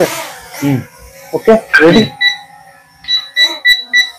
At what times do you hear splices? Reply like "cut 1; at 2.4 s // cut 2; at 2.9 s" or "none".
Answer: none